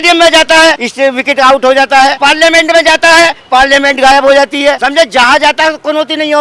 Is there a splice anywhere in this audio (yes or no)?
yes